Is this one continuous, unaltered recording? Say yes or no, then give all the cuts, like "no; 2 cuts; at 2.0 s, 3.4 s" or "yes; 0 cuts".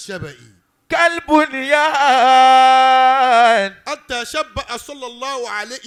yes; 0 cuts